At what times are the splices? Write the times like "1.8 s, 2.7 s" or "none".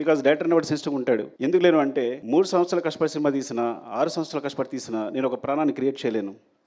1.3 s, 2.2 s